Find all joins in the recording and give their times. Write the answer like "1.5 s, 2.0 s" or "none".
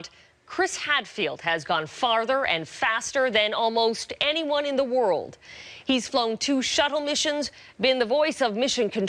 none